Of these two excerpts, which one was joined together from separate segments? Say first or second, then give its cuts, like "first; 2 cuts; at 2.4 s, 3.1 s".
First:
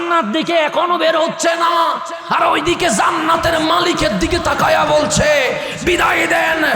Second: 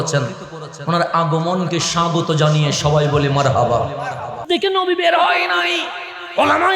second; 1 cut; at 4.4 s